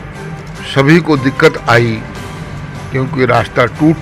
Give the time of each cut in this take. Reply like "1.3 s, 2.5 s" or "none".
none